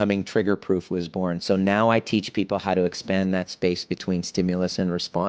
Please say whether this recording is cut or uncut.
uncut